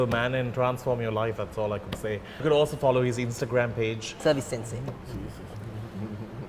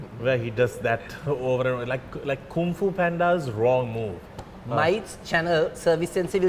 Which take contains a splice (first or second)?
first